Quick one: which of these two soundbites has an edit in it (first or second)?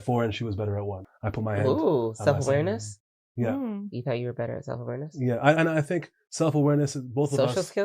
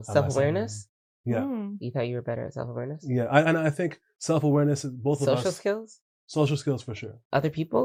first